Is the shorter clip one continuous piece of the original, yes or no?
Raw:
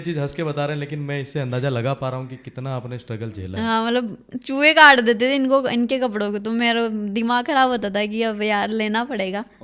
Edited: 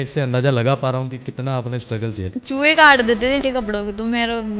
no